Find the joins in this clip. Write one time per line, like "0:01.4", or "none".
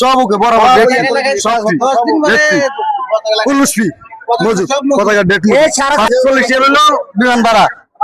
0:06.1